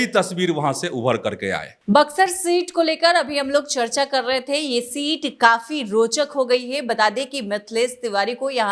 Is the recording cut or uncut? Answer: uncut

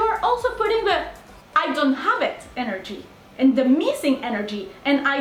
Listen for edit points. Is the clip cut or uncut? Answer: uncut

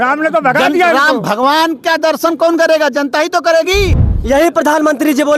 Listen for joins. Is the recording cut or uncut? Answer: cut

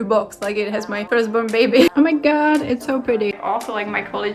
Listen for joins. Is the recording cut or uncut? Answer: cut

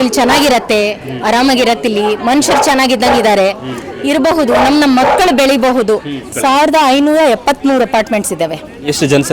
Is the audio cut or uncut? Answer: cut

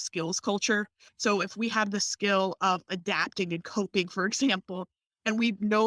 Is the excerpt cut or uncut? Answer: cut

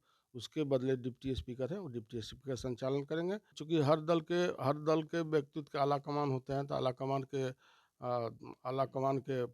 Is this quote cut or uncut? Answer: cut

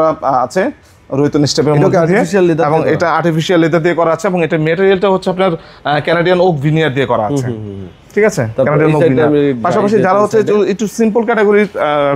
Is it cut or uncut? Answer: uncut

